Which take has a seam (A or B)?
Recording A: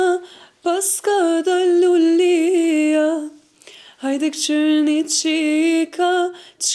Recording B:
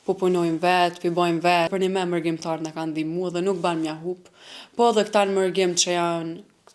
B